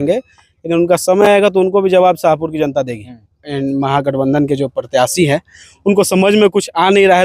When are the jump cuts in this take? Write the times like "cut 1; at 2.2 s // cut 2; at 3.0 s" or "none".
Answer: cut 1; at 3.1 s